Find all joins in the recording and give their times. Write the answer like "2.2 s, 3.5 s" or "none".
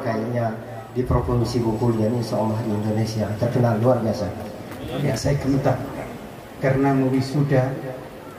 5.1 s